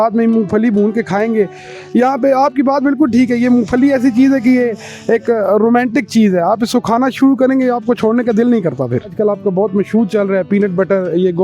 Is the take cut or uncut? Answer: cut